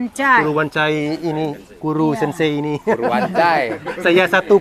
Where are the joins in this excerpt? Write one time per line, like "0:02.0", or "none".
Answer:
none